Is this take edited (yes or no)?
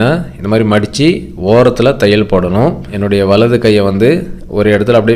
yes